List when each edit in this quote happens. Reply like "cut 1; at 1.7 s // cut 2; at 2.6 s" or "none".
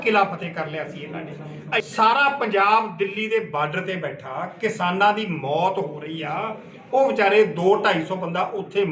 cut 1; at 1.8 s